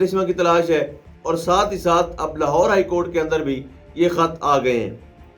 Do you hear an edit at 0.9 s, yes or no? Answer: no